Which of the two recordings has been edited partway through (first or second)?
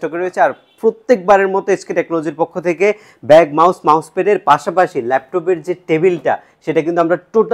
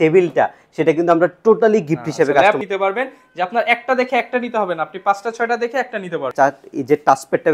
second